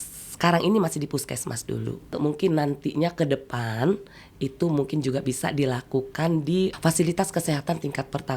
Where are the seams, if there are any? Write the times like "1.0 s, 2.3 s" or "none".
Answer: 2.1 s, 6.7 s

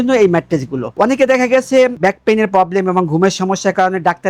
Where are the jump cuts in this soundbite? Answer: none

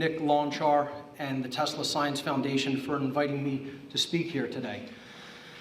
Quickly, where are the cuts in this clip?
1.3 s

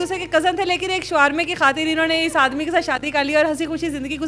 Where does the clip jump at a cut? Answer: none

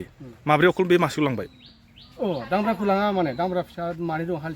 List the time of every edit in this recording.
none

